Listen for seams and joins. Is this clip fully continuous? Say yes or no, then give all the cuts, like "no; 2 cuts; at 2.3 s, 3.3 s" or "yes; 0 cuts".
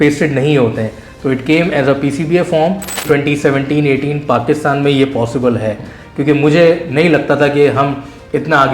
no; 1 cut; at 3.0 s